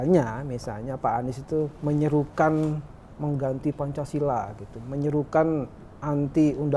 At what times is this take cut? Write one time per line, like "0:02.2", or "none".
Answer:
none